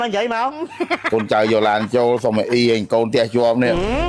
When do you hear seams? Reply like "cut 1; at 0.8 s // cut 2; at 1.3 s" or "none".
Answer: cut 1; at 1.0 s